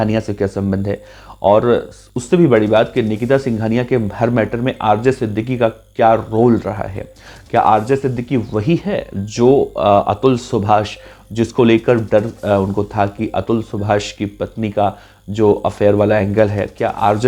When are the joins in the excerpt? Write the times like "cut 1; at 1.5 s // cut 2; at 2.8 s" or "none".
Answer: none